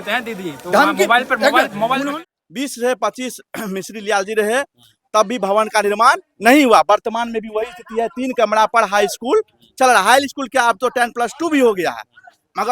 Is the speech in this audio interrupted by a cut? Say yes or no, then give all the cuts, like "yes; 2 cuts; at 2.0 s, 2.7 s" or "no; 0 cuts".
yes; 1 cut; at 2.1 s